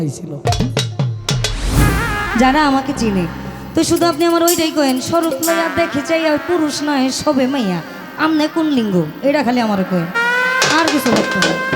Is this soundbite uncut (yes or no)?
no